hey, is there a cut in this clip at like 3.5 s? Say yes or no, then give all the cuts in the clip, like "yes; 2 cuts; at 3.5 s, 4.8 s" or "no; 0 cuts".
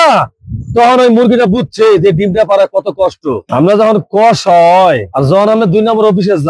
yes; 1 cut; at 3.5 s